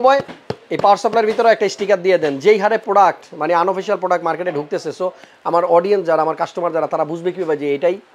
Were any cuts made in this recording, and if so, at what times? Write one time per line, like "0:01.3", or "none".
none